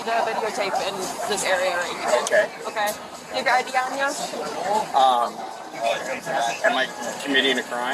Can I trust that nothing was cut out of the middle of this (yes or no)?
yes